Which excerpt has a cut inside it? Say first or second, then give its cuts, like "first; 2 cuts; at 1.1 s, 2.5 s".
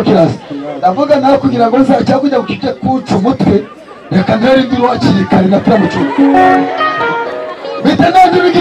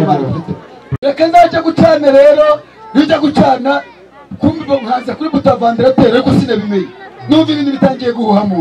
second; 1 cut; at 0.9 s